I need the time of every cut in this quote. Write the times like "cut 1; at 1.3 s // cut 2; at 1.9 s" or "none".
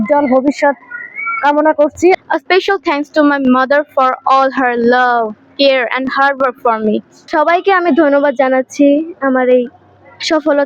cut 1; at 2.2 s // cut 2; at 7.3 s